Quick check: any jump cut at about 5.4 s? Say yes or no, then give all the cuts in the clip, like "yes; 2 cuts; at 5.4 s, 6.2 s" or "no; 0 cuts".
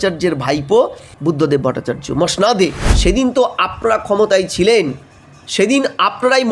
no; 2 cuts; at 1.0 s, 2.9 s